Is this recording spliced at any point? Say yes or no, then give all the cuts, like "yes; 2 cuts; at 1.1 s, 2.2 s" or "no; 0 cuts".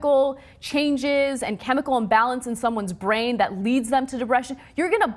no; 0 cuts